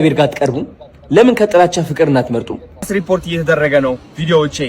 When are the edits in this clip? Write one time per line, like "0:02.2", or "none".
0:02.9